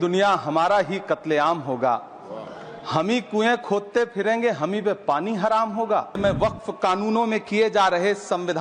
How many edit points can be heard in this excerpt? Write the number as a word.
one